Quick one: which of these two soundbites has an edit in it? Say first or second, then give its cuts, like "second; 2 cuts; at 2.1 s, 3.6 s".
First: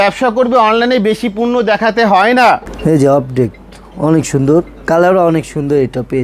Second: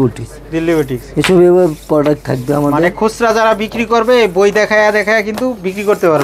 first; 1 cut; at 2.7 s